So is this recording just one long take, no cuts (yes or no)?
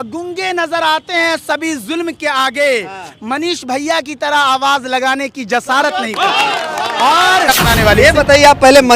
no